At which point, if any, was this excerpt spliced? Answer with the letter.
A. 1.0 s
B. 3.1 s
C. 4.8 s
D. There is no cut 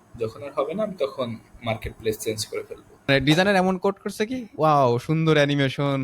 B